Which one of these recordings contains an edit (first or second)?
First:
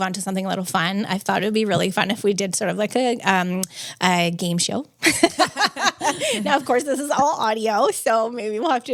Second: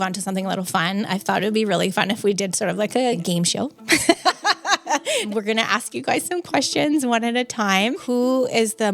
second